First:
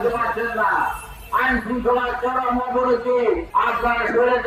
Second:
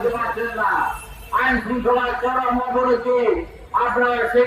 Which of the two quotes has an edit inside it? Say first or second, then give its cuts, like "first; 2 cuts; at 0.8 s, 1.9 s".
first; 1 cut; at 3.4 s